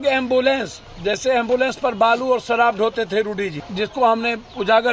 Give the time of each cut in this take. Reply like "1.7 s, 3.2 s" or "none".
3.6 s

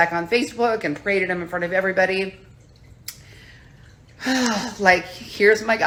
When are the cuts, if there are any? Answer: none

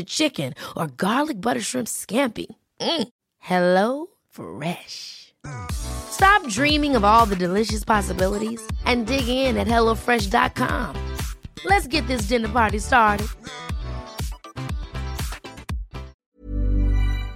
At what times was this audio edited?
16.2 s

